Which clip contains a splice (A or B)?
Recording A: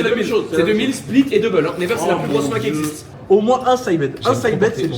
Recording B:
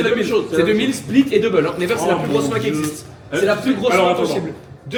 A